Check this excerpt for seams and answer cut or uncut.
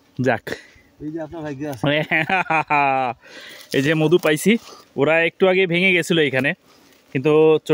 uncut